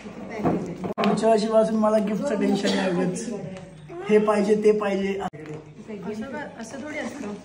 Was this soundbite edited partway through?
yes; 2 cuts; at 1.0 s, 5.3 s

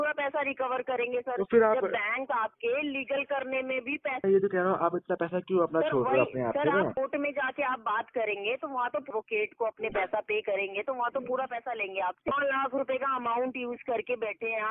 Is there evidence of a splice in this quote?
yes; 4 cuts; at 4.2 s, 7.0 s, 9.1 s, 12.3 s

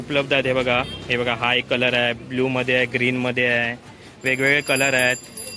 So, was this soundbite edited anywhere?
no; 0 cuts

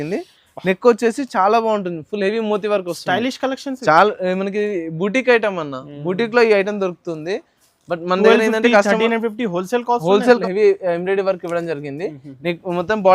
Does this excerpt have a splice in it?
yes; 1 cut; at 10.4 s

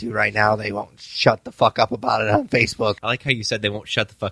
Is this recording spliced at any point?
yes; 1 cut; at 3.0 s

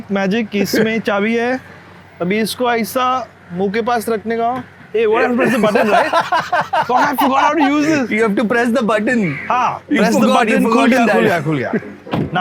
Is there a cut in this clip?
no; 0 cuts

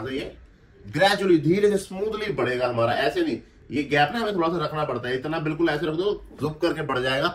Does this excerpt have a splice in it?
no; 0 cuts

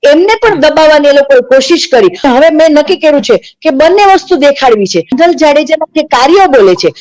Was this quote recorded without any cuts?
no; 2 cuts; at 2.2 s, 5.1 s

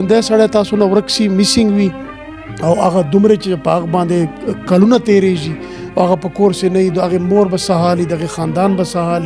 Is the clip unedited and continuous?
yes; 0 cuts

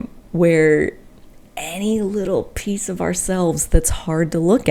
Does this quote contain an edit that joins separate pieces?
no; 0 cuts

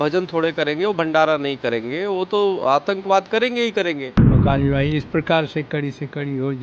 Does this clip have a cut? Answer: yes; 1 cut; at 4.4 s

